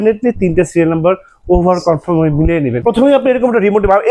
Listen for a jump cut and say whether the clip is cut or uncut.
cut